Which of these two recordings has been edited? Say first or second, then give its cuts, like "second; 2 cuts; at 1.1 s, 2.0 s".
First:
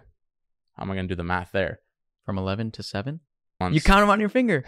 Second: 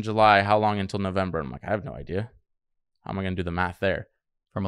first; 1 cut; at 3.5 s